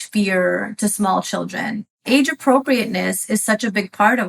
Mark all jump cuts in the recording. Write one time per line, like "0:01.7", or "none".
0:02.0